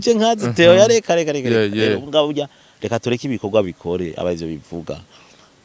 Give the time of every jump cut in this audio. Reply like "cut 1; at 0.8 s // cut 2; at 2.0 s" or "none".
none